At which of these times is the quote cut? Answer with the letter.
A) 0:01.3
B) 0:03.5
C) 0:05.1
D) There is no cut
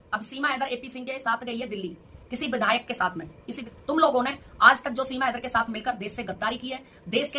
B